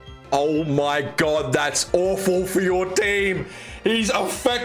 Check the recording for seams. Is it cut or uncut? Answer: uncut